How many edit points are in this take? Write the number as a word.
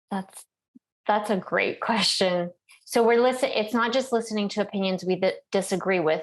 zero